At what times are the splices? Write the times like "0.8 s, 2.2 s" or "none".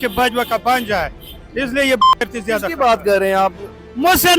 none